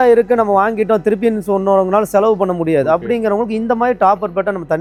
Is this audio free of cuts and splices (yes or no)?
yes